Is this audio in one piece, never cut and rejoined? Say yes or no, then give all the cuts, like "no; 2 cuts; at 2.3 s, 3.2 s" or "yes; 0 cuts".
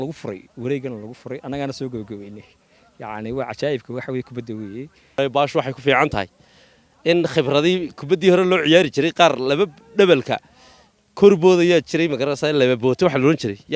no; 1 cut; at 5.2 s